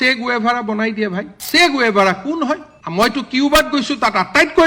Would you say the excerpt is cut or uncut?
cut